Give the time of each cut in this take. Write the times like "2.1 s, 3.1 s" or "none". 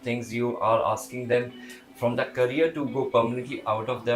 none